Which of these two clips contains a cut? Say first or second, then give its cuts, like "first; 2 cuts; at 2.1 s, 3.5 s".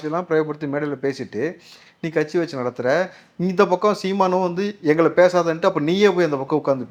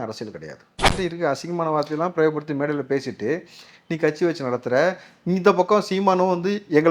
second; 1 cut; at 0.9 s